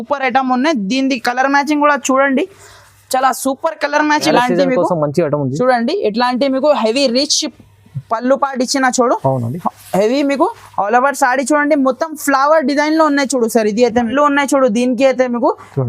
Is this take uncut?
no; 2 cuts; at 4.3 s, 14.1 s

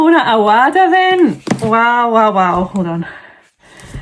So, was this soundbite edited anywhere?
no; 0 cuts

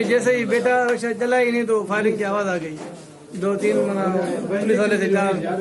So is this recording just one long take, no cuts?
yes; 0 cuts

